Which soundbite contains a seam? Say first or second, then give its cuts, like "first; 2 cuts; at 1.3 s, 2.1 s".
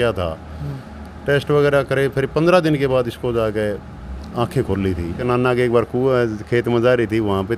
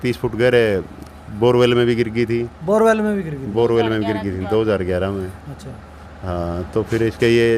first; 1 cut; at 5.2 s